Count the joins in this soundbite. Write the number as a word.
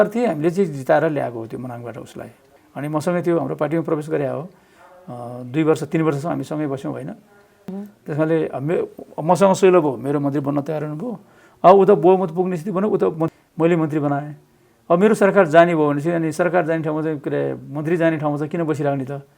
three